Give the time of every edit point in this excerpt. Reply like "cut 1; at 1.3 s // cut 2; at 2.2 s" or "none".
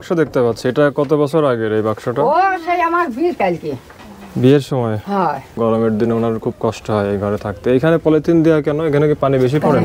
cut 1; at 5.5 s

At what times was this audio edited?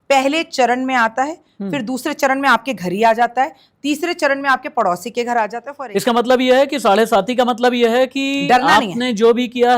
cut 1; at 5.7 s

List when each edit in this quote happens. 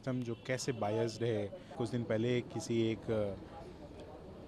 cut 1; at 1.7 s

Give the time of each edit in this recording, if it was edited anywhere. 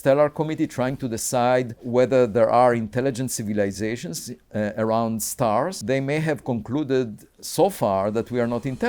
cut 1; at 1.8 s // cut 2; at 5.8 s

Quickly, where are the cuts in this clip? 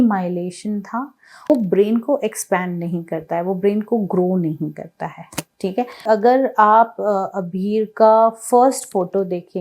cut 1; at 1.5 s // cut 2; at 6.0 s

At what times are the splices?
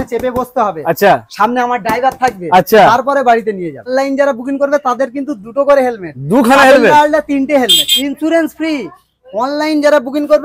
cut 1; at 3.9 s // cut 2; at 7.9 s

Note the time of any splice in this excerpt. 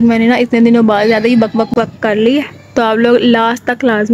cut 1; at 1.7 s

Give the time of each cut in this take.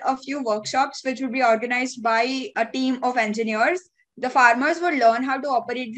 none

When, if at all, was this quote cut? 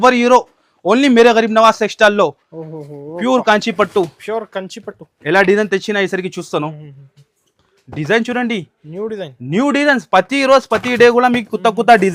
none

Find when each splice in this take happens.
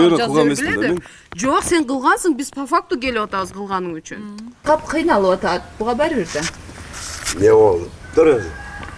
cut 1; at 4.5 s

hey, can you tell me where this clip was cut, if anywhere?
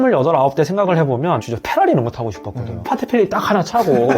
cut 1; at 2.8 s

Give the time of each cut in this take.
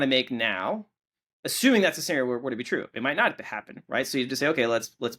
none

